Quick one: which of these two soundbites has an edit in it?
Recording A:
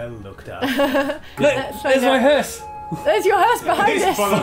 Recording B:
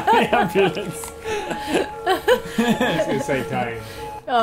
A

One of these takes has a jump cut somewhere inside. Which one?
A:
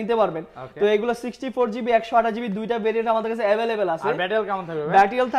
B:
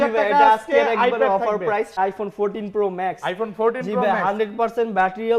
B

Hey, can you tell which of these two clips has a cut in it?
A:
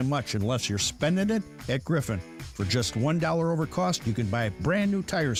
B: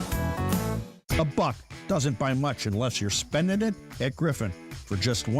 B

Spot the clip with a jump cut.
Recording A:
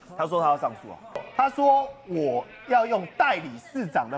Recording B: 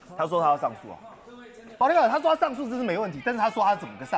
A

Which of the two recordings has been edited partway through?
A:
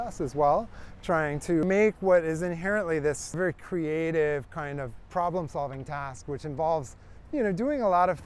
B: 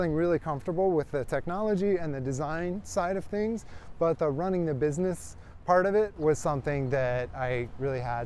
A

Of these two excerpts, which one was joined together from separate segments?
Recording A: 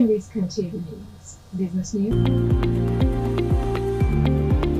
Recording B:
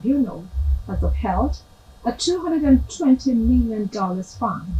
A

